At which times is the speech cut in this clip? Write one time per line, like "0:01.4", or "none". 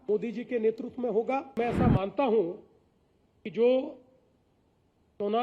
0:01.5